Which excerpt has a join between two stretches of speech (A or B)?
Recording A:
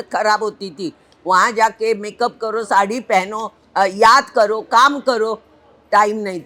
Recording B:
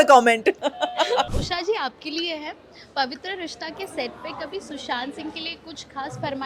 B